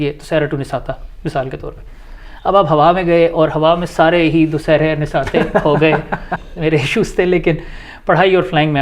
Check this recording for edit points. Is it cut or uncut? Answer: cut